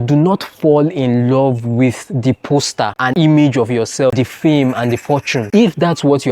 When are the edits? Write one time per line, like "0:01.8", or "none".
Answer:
0:04.1